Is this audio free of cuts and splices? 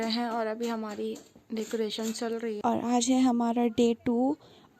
no; 1 cut; at 2.6 s

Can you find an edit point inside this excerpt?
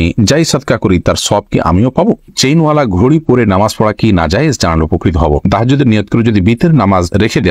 yes; 2 cuts; at 2.3 s, 5.5 s

